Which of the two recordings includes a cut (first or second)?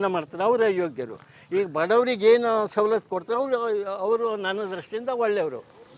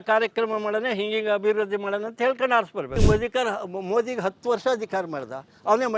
second